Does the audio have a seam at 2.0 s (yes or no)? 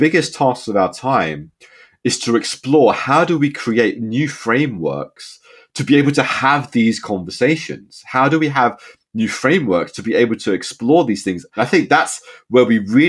no